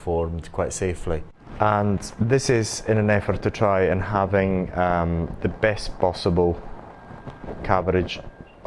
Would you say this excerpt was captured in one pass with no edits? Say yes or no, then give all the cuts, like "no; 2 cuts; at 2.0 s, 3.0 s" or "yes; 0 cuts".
no; 1 cut; at 1.4 s